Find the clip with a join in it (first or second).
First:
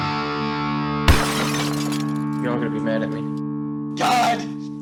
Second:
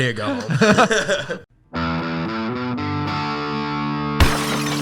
second